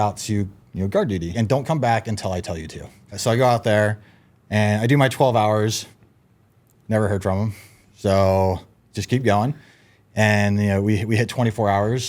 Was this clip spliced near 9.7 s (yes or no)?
no